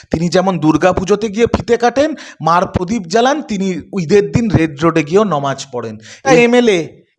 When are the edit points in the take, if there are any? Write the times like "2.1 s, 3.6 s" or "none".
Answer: 6.2 s

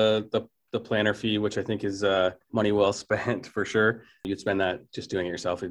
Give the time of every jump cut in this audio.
2.4 s, 4.3 s

